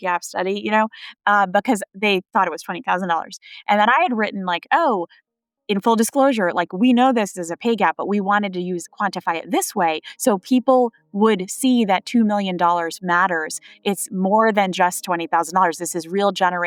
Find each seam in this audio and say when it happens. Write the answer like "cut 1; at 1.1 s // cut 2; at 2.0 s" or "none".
none